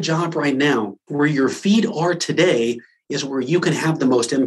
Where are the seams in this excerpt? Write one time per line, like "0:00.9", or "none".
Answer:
0:01.0